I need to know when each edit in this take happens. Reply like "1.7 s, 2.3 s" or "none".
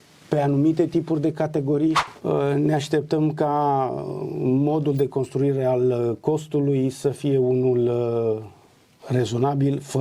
2.1 s